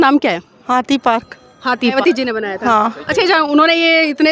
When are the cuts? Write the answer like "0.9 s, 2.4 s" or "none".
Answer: 1.9 s

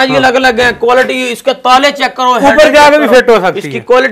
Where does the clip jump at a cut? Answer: none

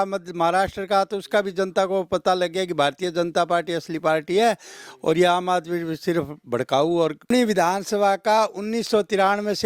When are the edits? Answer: 7.3 s

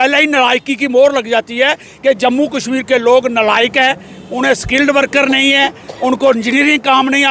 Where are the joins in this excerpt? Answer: none

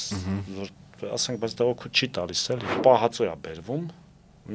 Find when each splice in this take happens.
2.7 s

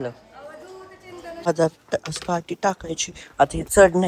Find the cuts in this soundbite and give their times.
1.5 s

